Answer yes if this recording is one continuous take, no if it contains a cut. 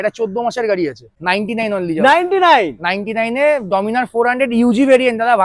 no